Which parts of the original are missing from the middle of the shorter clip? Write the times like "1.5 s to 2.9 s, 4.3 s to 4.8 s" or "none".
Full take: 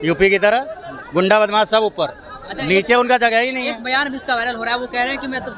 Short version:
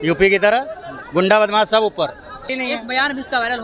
2.5 s to 3.5 s